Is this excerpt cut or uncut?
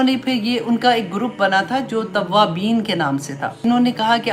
uncut